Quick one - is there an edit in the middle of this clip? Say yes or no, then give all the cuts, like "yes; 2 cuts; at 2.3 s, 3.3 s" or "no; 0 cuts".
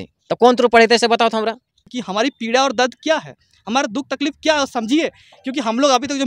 yes; 1 cut; at 1.9 s